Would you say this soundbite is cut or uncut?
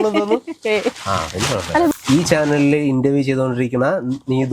cut